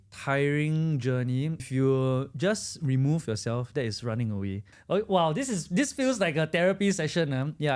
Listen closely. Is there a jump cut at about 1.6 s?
yes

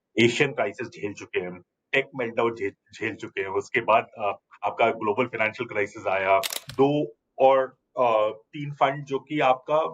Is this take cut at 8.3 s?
no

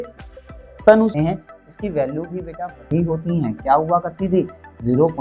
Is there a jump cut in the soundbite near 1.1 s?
yes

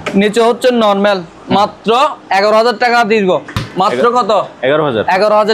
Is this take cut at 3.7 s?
no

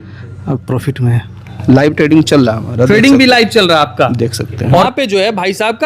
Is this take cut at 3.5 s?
no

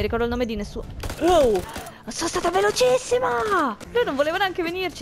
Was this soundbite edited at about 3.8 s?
yes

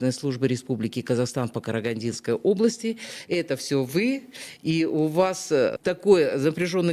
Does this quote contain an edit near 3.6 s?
no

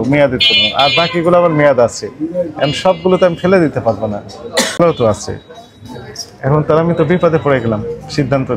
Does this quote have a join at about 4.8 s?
yes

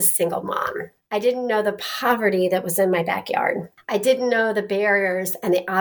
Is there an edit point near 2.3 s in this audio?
no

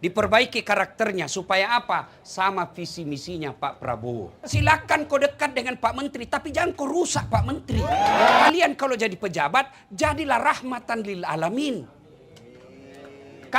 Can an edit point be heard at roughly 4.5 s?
yes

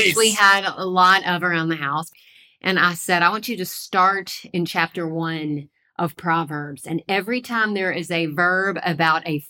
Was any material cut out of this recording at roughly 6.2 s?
no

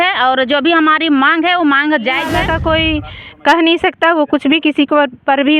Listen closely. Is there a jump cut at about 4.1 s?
no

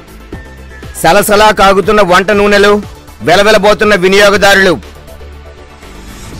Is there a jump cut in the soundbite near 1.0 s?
no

